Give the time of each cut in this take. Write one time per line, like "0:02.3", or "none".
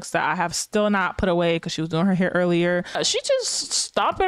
0:03.0